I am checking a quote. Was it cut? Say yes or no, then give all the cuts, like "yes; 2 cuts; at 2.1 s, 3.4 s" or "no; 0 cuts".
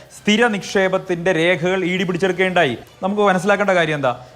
yes; 1 cut; at 2.9 s